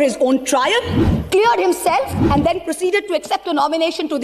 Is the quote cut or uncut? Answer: uncut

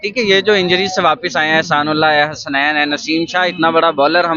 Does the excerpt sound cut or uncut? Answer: uncut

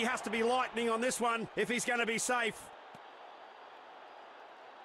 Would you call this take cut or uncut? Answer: cut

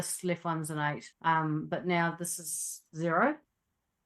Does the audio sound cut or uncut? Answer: cut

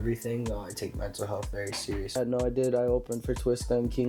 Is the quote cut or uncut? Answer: cut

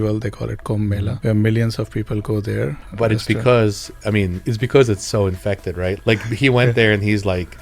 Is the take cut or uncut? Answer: cut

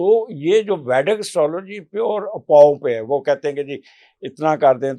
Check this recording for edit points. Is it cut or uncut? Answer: uncut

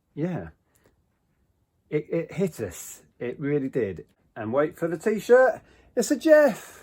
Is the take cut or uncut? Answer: cut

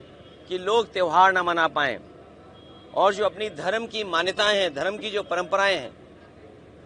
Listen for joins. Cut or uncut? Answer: uncut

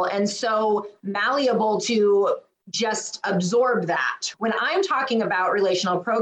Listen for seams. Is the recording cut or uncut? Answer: cut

